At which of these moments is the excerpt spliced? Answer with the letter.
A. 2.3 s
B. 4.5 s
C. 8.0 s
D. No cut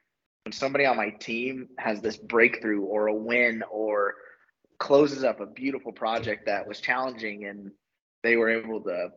D